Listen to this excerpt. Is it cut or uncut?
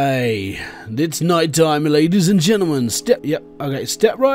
cut